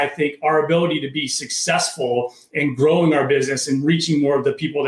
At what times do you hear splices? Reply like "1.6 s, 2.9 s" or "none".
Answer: none